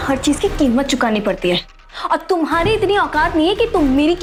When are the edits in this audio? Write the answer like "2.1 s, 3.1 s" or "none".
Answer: none